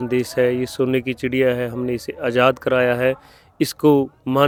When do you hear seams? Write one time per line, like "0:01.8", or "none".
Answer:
none